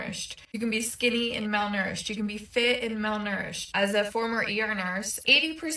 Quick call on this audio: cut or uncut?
cut